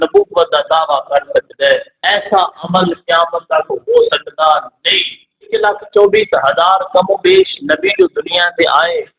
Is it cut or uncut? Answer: cut